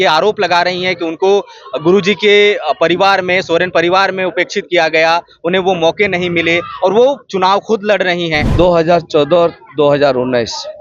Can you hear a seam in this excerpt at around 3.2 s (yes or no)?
no